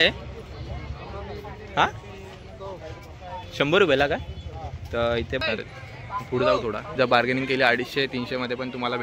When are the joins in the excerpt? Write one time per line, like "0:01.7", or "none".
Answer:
0:05.4
0:06.9